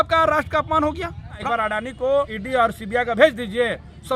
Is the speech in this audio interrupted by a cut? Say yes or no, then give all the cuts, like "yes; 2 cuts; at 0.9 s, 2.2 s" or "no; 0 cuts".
yes; 2 cuts; at 1.4 s, 2.4 s